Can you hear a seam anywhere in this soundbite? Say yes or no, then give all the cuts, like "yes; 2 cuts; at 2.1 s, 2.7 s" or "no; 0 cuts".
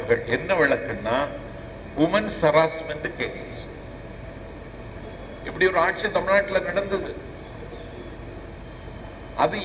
no; 0 cuts